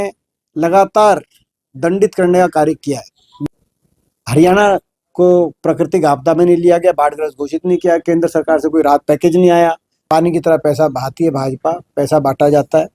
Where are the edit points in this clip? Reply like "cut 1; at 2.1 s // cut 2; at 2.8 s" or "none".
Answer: cut 1; at 3.2 s // cut 2; at 10.0 s